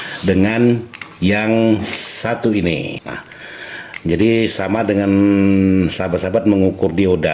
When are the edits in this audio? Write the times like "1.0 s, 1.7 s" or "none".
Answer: 3.0 s